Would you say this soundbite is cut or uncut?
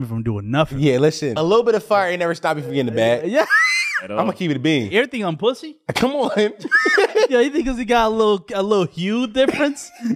cut